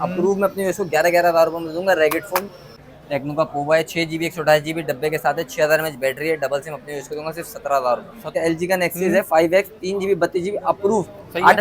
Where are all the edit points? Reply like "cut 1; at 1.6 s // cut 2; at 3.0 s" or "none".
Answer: cut 1; at 2.6 s // cut 2; at 8.2 s